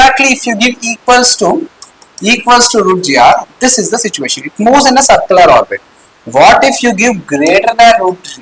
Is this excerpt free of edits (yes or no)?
yes